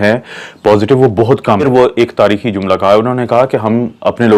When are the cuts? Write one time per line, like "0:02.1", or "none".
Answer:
0:01.6